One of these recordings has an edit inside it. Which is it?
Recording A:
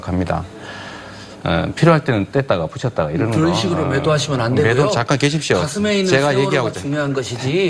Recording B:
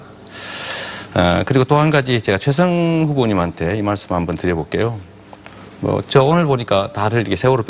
B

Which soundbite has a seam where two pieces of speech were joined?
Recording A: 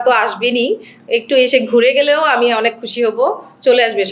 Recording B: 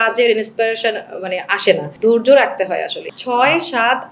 B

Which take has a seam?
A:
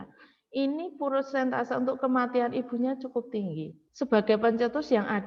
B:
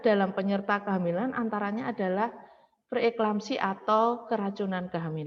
A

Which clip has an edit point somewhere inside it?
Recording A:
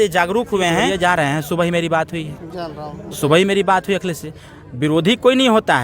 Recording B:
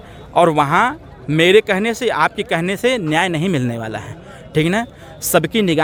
A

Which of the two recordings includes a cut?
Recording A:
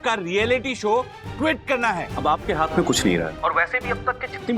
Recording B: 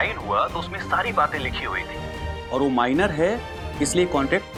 A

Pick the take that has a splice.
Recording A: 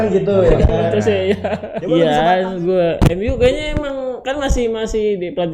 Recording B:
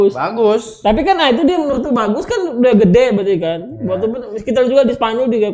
A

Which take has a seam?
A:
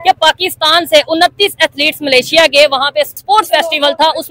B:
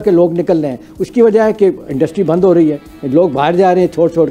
A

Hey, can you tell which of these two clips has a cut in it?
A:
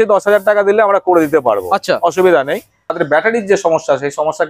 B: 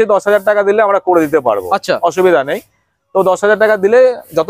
A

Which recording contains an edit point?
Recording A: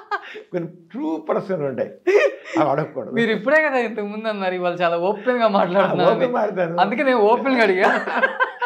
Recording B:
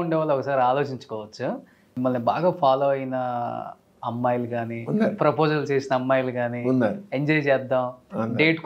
B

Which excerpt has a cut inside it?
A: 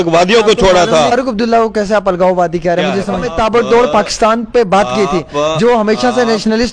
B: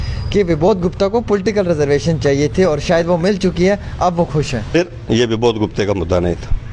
A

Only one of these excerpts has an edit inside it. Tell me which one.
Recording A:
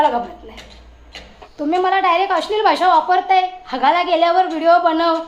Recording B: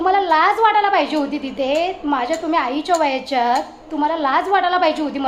A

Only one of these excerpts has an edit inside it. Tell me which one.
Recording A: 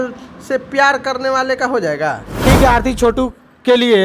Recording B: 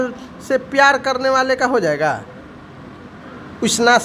A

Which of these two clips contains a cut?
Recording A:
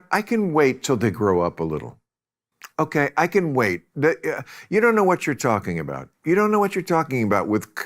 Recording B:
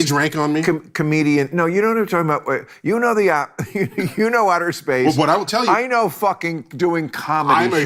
A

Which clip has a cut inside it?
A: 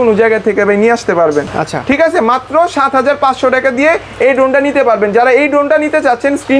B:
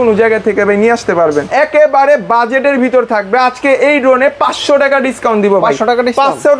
B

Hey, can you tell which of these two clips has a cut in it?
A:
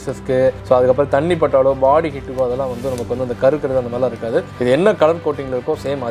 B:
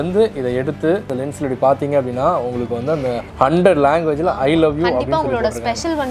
B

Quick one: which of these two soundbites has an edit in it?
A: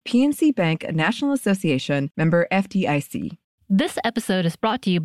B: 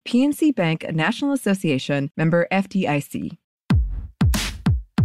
B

